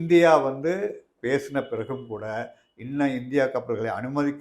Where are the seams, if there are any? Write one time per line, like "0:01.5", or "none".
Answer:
0:01.1